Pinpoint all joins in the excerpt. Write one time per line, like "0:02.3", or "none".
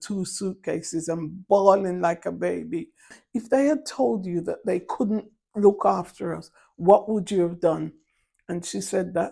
0:03.2